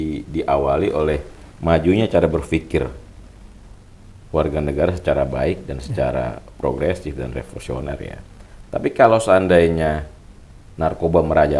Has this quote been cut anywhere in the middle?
no; 0 cuts

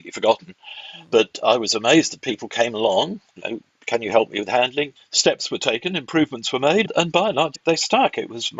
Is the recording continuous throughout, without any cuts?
no; 2 cuts; at 4.9 s, 7.6 s

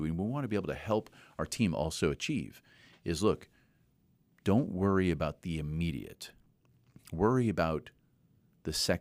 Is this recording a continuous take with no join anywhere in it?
yes; 0 cuts

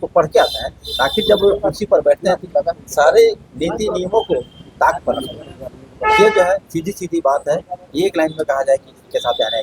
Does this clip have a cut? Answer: no; 0 cuts

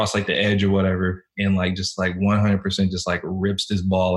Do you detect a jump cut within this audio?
no; 0 cuts

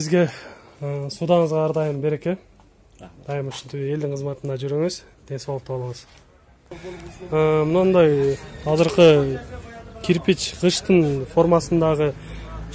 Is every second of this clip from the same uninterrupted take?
yes; 0 cuts

